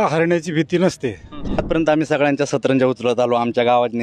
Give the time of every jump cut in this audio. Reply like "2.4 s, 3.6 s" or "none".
1.6 s

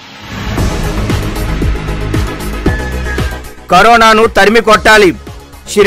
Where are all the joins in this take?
none

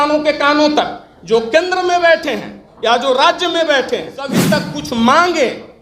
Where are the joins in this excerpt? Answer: 4.5 s

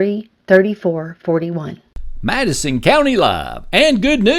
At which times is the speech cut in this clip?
1.8 s

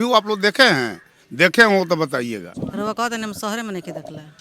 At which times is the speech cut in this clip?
2.5 s

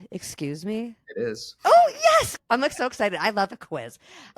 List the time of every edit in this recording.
1.3 s, 2.4 s

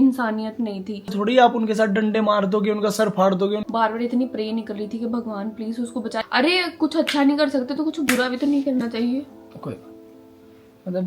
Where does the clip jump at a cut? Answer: 1.1 s, 3.6 s, 6.2 s

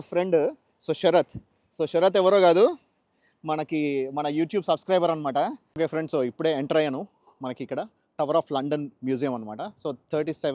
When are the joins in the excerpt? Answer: 5.6 s

